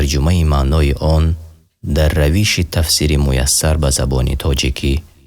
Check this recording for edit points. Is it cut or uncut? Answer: uncut